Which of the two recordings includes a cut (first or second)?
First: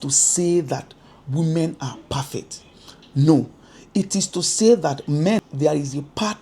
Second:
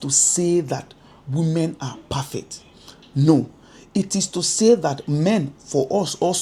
first